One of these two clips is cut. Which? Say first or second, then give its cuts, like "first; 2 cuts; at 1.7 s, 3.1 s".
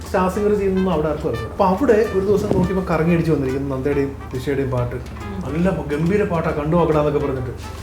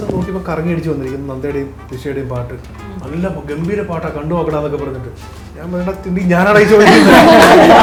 first; 1 cut; at 1.4 s